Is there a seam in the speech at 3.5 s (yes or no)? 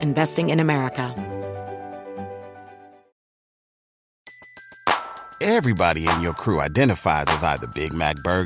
no